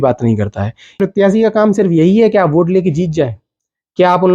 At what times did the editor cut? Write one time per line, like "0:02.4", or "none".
0:01.0